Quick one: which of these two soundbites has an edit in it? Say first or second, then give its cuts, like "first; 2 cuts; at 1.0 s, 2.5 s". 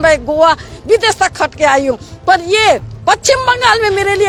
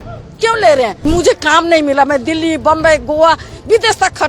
second; 1 cut; at 1.0 s